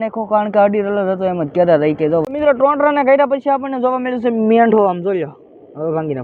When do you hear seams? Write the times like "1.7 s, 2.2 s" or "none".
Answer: 2.2 s